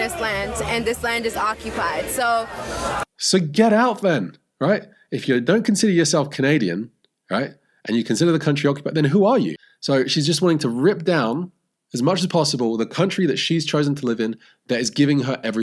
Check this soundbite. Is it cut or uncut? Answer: cut